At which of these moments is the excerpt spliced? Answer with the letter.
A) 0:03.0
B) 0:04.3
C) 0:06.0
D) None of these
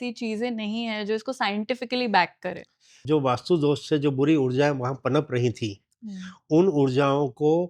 A